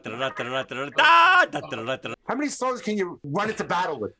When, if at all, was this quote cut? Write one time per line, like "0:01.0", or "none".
0:02.1
0:03.3